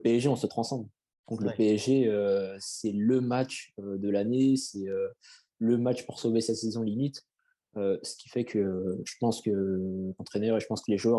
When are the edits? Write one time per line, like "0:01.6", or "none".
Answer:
none